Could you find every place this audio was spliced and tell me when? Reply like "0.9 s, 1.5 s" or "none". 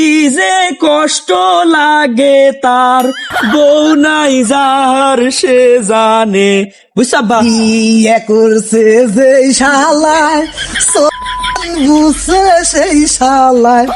3.3 s